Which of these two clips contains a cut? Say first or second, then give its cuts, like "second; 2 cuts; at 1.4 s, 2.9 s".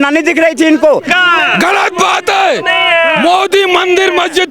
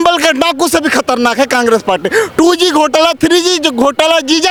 first; 1 cut; at 1.1 s